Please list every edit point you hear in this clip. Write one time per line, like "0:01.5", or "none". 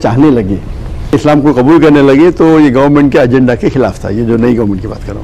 0:01.1